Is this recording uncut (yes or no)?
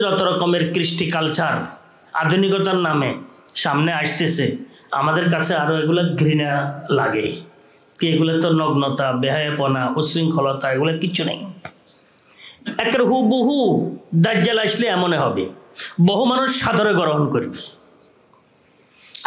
yes